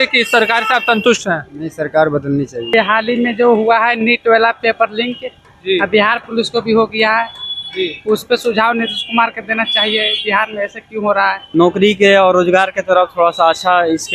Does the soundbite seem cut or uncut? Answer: cut